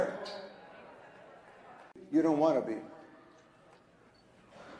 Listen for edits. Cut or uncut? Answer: uncut